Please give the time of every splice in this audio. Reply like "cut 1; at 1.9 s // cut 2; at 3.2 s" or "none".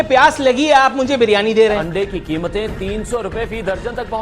cut 1; at 1.8 s